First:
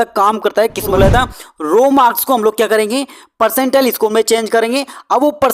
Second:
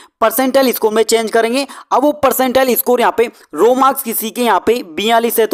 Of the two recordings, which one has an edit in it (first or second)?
first